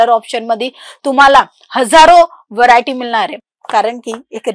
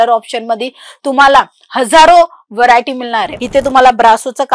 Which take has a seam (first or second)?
second